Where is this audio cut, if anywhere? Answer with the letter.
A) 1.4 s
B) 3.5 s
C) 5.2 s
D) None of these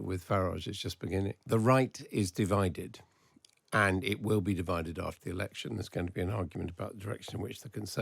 A